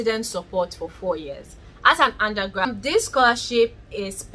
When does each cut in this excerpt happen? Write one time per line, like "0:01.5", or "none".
0:02.7